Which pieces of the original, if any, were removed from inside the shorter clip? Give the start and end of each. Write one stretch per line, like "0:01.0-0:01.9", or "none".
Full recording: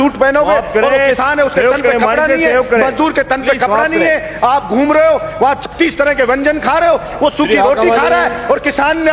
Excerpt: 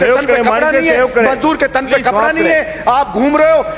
none

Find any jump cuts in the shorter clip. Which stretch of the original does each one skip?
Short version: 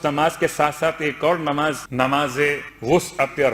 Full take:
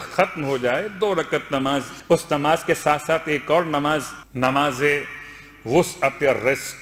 0:04.1-0:04.3
0:05.1-0:05.5

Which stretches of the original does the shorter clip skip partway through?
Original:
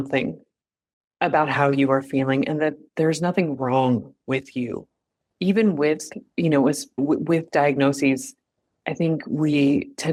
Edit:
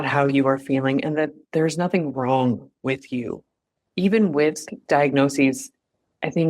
0:06.3-0:07.5

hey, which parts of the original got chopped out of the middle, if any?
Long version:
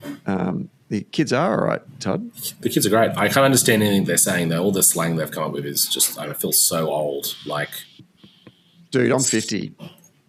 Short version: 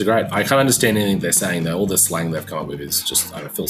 none

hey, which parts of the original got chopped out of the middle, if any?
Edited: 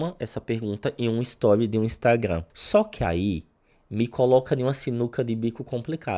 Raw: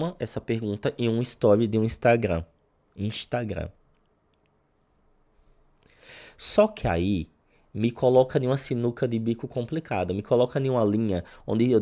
0:02.5-0:06.4

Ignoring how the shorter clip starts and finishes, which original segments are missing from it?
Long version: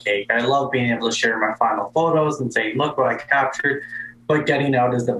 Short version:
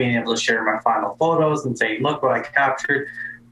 none

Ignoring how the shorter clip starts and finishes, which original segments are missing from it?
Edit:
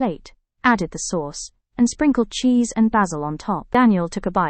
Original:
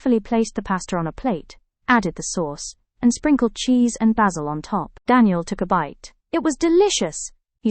0:04.8-0:05.0

